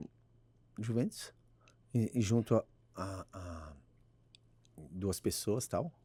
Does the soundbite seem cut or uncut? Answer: uncut